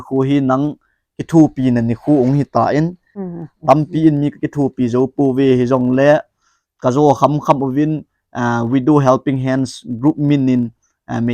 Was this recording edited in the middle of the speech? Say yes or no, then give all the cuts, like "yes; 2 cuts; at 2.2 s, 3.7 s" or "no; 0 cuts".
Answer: yes; 1 cut; at 3.3 s